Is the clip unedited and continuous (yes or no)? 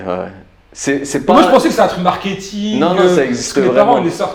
yes